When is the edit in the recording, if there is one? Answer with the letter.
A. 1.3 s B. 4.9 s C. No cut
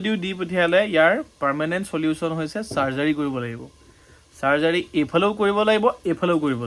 C